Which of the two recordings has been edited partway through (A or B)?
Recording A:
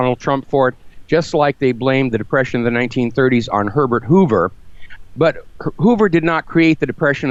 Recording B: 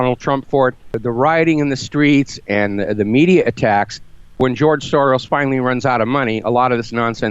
B